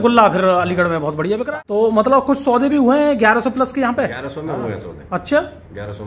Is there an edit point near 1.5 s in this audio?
yes; 1 cut; at 1.5 s

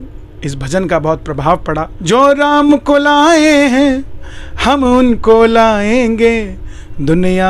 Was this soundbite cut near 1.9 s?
yes; 1 cut; at 1.9 s

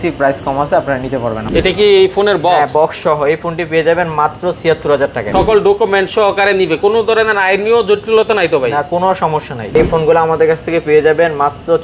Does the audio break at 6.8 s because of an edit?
no; 3 cuts; at 1.4 s, 5.2 s, 9.7 s

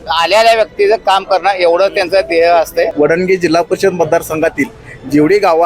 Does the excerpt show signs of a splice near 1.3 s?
no; 1 cut; at 2.9 s

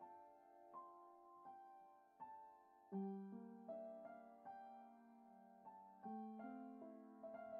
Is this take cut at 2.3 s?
no; 0 cuts

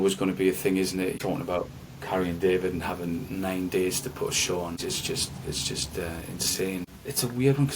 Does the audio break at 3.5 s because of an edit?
no; 3 cuts; at 1.1 s, 4.8 s, 7.0 s

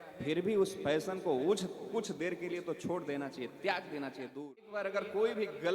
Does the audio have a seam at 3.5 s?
no; 1 cut; at 4.7 s

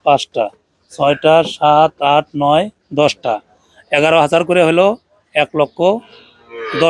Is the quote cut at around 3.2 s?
no; 0 cuts

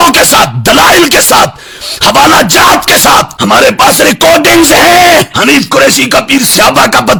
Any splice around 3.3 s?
no; 0 cuts

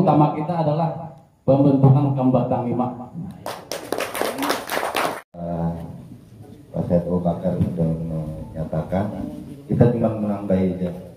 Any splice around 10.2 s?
no; 1 cut; at 5.2 s

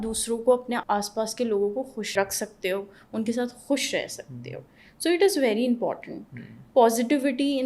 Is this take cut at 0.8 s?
yes; 2 cuts; at 0.8 s, 2.1 s

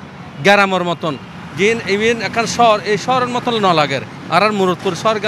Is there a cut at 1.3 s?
no; 0 cuts

